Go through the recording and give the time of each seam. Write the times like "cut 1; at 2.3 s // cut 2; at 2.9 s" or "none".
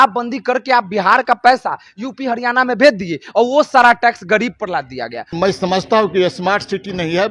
cut 1; at 5.3 s